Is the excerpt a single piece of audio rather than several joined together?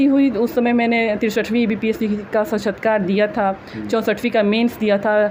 yes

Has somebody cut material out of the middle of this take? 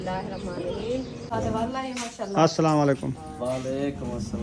yes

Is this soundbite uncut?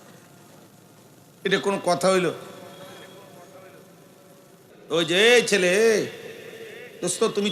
no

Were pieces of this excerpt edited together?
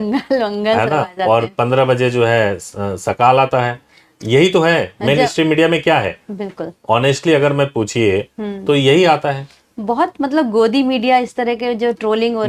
no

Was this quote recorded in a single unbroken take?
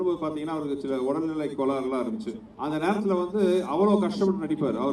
no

